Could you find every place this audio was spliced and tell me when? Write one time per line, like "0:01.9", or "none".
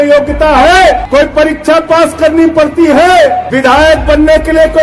0:01.0
0:03.5